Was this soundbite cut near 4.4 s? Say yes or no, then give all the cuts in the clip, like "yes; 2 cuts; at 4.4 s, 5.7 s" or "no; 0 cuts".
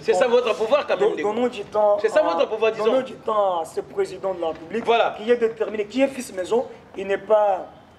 no; 0 cuts